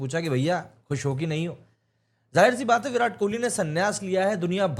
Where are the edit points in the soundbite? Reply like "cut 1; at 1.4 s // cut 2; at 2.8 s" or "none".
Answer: none